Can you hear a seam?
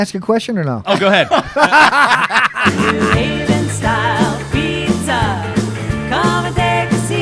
yes; 1 cut; at 2.6 s

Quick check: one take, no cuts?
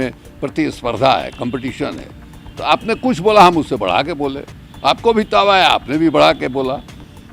yes; 0 cuts

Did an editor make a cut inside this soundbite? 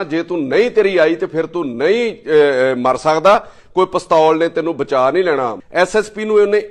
yes; 1 cut; at 5.6 s

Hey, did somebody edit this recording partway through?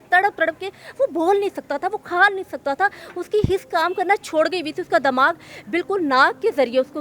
no; 0 cuts

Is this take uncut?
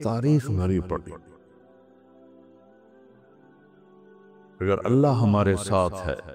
no; 3 cuts; at 1.3 s, 2.6 s, 4.5 s

